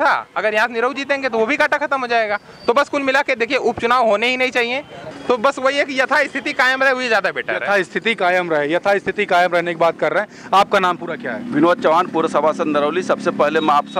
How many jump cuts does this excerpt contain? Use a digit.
1